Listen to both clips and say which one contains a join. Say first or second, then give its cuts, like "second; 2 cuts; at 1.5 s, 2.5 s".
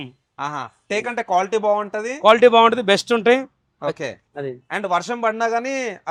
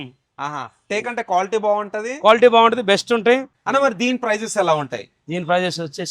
second; 1 cut; at 3.5 s